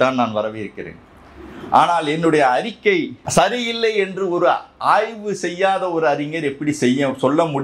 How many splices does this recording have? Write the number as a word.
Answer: one